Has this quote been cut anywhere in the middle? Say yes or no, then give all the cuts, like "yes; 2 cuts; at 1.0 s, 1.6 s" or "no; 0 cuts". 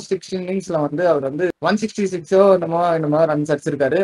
yes; 1 cut; at 1.6 s